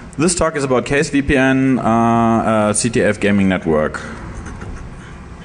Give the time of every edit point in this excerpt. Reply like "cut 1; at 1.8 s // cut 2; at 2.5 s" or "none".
cut 1; at 3.0 s